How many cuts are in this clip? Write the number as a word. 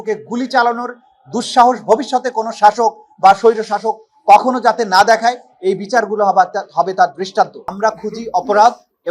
one